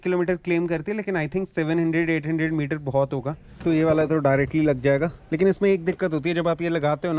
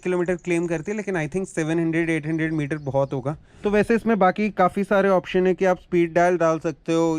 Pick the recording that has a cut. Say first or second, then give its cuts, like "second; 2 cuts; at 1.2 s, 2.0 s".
first; 2 cuts; at 3.4 s, 5.2 s